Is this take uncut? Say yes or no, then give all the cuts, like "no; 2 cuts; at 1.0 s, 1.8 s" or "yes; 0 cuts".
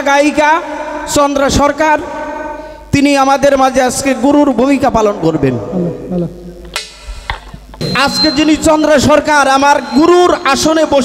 no; 1 cut; at 7.9 s